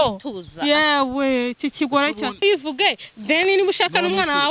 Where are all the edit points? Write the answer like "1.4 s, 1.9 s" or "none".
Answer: 2.4 s